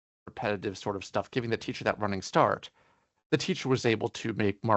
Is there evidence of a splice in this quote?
no; 0 cuts

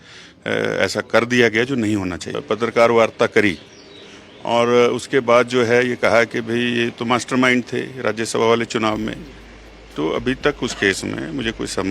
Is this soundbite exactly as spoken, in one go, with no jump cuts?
no; 1 cut; at 2.3 s

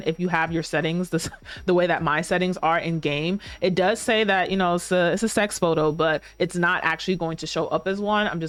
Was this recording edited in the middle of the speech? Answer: no; 0 cuts

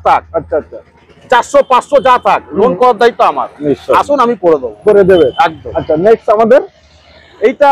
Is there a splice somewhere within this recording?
no; 0 cuts

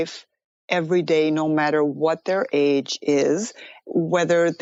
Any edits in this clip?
no; 0 cuts

